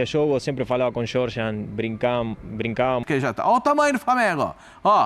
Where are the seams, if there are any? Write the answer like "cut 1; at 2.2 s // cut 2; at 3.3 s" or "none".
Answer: cut 1; at 3.0 s